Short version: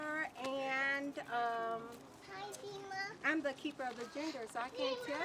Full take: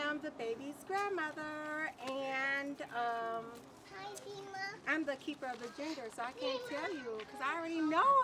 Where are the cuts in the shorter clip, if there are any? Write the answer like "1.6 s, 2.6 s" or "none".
none

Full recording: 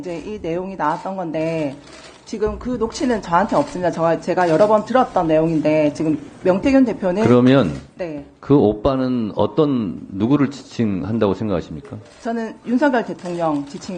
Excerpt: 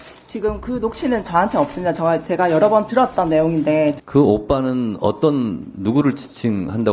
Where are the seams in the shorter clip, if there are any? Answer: 4.0 s

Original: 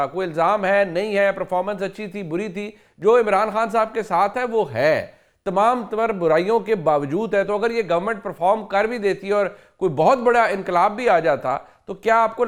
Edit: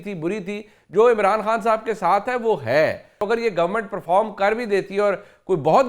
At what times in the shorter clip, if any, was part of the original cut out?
3.2 s

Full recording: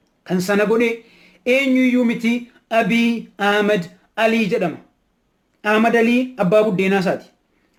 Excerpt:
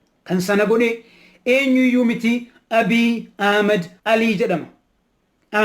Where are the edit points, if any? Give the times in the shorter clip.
3.9 s

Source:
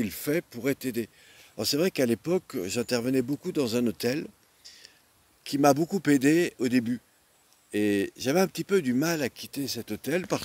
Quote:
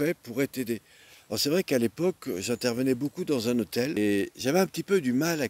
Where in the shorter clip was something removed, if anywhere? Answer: 3.9 s

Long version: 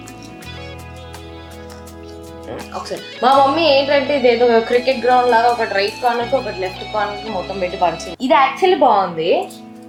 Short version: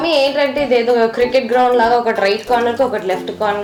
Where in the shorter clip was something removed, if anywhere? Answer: none

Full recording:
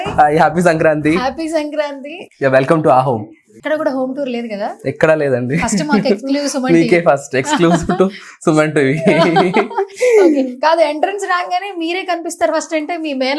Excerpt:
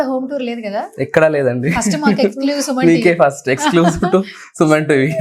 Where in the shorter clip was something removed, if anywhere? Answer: none

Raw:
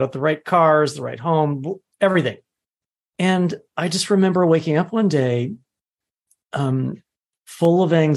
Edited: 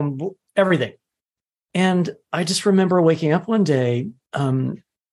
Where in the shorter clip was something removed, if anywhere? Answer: 4.2 s

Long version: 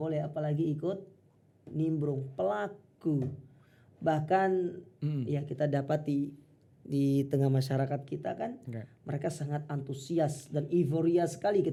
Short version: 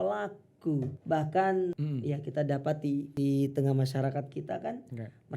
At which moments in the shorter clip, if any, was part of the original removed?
1.0 s, 1.8 s, 3.1 s

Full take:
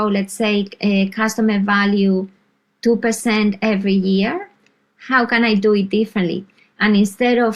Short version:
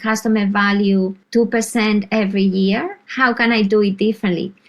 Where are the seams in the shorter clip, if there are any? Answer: 1.2 s, 3.0 s

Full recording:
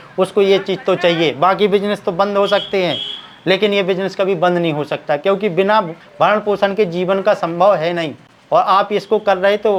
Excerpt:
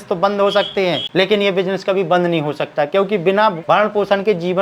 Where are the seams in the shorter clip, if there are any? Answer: 1.0 s, 3.6 s

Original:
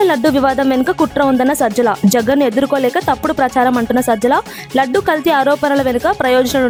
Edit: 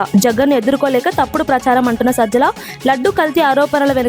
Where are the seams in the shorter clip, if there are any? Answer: none

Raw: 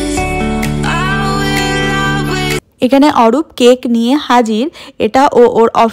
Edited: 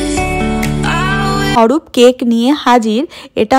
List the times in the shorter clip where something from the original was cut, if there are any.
1.6 s

